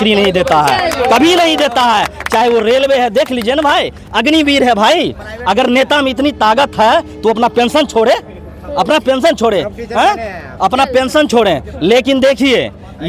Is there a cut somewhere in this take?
no; 0 cuts

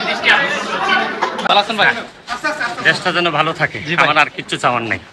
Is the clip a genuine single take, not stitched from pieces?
no; 1 cut; at 1.5 s

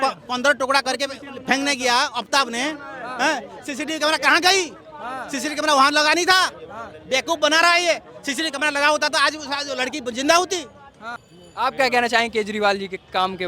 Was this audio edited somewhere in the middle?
no; 0 cuts

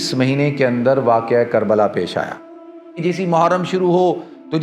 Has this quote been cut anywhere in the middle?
yes; 1 cut; at 2.9 s

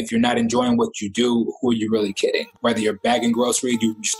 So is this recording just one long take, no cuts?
no; 1 cut; at 2.5 s

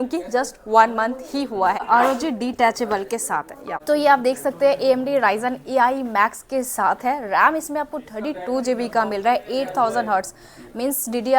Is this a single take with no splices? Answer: no; 2 cuts; at 1.9 s, 3.7 s

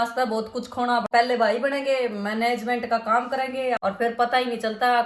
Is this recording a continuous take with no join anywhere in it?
no; 2 cuts; at 1.0 s, 3.8 s

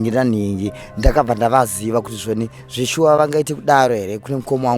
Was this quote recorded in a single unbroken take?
yes; 0 cuts

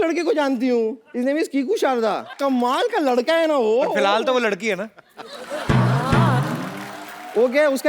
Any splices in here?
yes; 2 cuts; at 1.0 s, 2.3 s

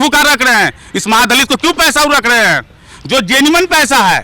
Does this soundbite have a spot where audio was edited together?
no; 0 cuts

